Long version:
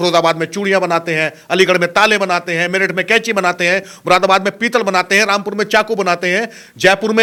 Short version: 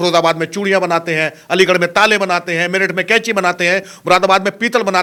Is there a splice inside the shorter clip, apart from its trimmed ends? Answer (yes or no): no